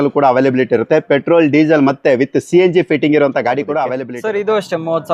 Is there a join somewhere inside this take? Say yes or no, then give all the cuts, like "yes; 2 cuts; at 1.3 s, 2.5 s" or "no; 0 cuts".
yes; 1 cut; at 4.0 s